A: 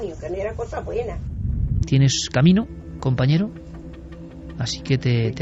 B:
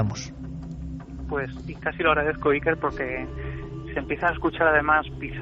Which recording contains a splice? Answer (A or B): A